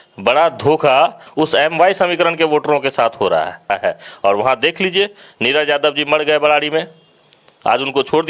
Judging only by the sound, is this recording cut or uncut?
cut